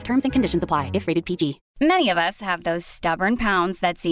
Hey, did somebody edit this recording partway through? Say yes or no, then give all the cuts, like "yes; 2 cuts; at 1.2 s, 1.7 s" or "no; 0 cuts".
yes; 1 cut; at 1.6 s